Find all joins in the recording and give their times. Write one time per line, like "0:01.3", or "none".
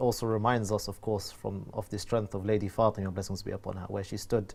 none

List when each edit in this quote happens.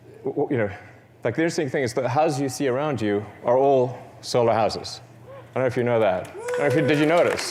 none

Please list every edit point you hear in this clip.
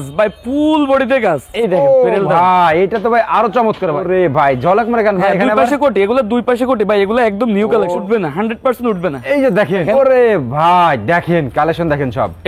0:01.5
0:04.0
0:08.0
0:09.8

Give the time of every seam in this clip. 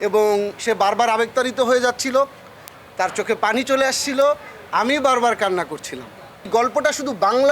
0:06.5

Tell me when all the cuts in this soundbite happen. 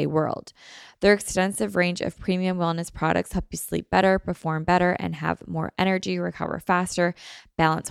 none

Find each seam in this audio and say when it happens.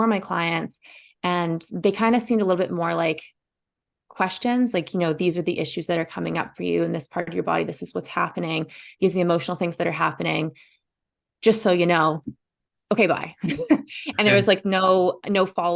none

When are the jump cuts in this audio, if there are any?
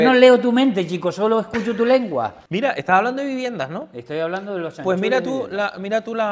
0:02.4

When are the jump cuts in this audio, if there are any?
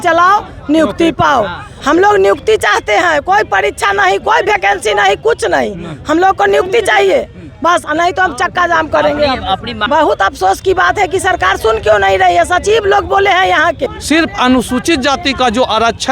0:01.7
0:09.7
0:13.9

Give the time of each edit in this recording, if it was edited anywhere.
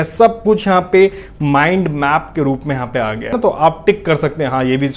0:03.3

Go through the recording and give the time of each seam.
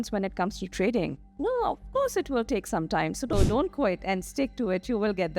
0:03.3

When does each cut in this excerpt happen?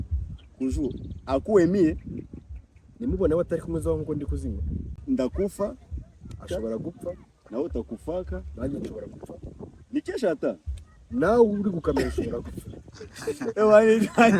0:04.9

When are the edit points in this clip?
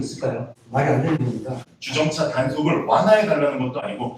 0:01.7

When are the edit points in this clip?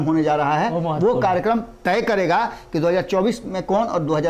none

